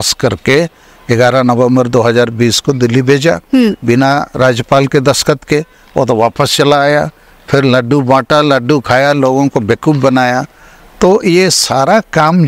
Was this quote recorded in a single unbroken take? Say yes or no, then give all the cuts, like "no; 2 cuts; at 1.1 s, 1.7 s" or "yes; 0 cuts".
yes; 0 cuts